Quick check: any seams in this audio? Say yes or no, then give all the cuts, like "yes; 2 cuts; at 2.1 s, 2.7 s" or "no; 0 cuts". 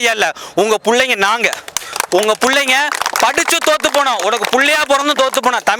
no; 0 cuts